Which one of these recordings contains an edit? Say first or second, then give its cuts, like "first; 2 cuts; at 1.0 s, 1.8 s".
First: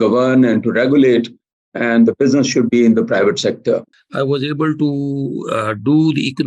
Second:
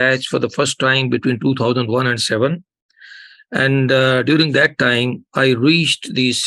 first; 1 cut; at 4.0 s